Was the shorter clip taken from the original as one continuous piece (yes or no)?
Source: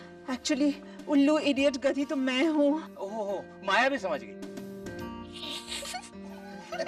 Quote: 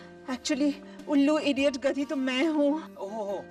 yes